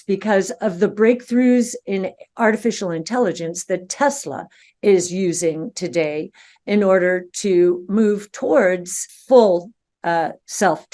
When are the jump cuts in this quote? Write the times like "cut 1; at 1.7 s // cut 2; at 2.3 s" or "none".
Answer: none